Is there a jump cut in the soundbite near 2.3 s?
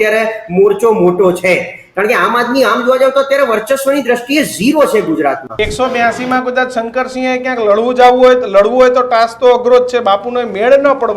no; 1 cut; at 5.5 s

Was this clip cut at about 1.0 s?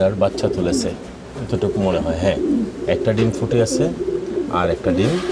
no; 0 cuts

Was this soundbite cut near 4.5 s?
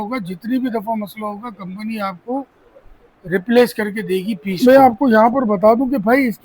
yes; 1 cut; at 4.5 s

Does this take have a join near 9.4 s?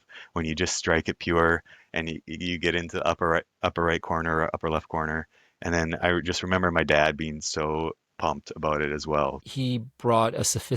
yes; 1 cut; at 9.4 s

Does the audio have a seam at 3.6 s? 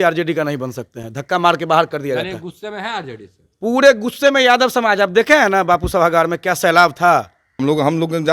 no; 1 cut; at 7.4 s

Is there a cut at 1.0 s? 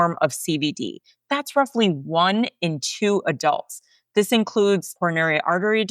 no; 1 cut; at 4.9 s

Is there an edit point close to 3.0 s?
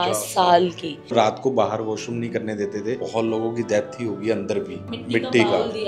yes; 3 cuts; at 1.1 s, 3.0 s, 4.9 s

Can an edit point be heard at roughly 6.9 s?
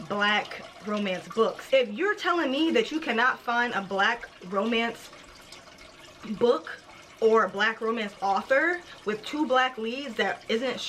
no; 1 cut; at 1.6 s

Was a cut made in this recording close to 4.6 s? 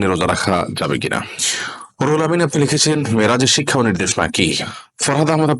yes; 2 cuts; at 1.4 s, 4.6 s

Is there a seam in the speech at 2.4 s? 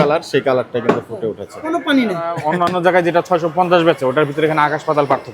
yes; 1 cut; at 2.4 s

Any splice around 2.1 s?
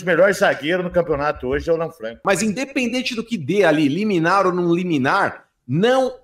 yes; 1 cut; at 2.1 s

